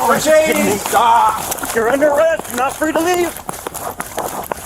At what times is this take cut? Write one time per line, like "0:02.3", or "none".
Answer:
0:01.7